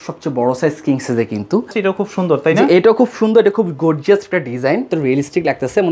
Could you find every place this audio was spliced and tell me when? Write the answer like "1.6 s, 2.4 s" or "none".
1.7 s, 4.9 s

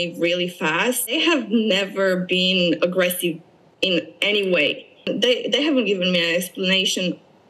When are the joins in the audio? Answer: 1.1 s, 5.1 s

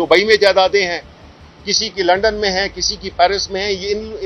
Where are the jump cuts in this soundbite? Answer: none

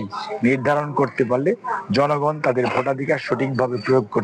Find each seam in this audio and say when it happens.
none

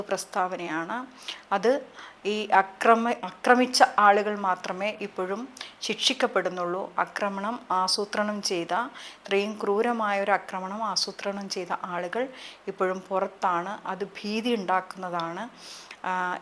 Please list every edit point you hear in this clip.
none

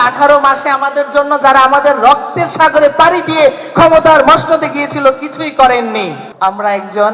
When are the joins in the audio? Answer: 6.2 s

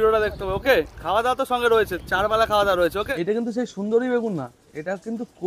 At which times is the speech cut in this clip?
1.0 s, 2.0 s, 3.1 s

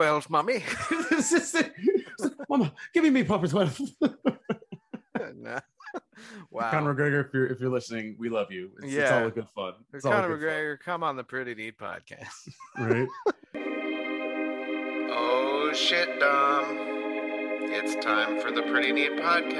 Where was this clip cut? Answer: 13.5 s

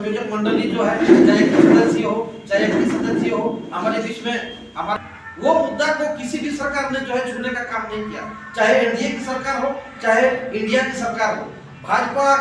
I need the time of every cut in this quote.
5.0 s

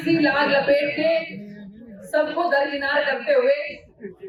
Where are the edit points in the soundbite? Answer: none

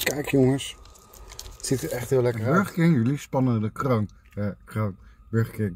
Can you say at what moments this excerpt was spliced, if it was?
2.4 s

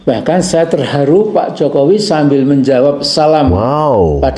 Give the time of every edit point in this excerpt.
1.3 s

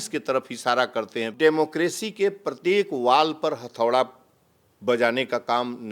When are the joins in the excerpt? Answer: 1.3 s

